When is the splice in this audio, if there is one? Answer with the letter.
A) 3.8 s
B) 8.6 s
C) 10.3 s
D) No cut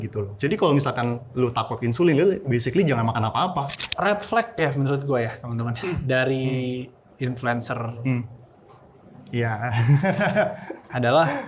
A